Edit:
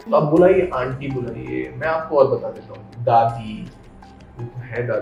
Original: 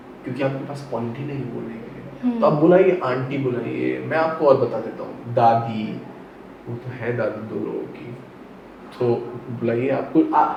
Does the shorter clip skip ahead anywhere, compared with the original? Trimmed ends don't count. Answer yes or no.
no